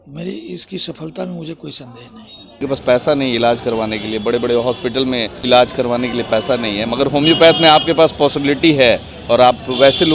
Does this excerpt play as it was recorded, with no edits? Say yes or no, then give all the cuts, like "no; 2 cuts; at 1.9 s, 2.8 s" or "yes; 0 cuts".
no; 2 cuts; at 2.5 s, 5.3 s